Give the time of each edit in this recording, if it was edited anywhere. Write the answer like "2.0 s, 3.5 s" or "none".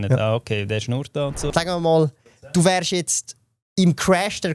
1.4 s